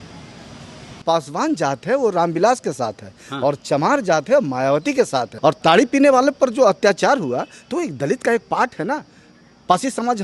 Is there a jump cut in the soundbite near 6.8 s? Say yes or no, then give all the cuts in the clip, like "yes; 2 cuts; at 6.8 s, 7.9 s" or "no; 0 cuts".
no; 2 cuts; at 0.9 s, 5.3 s